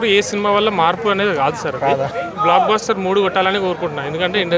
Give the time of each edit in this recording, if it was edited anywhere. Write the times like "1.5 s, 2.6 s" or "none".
2.1 s